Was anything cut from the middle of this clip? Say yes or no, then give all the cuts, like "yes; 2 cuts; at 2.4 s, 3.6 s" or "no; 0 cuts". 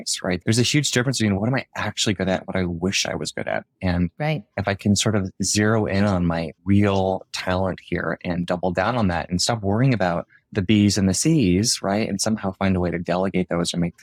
no; 0 cuts